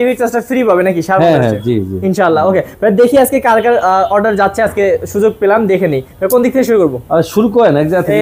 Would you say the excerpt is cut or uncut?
uncut